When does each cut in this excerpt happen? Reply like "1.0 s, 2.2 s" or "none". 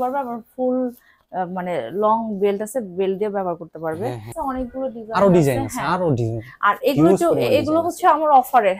4.3 s

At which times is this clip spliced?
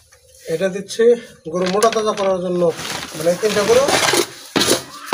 2.8 s

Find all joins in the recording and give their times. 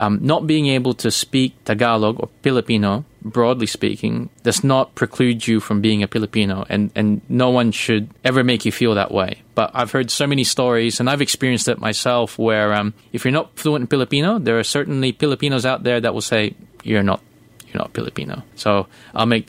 4.3 s, 8.1 s, 13.0 s, 18.4 s

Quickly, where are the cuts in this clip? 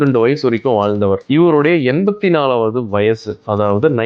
none

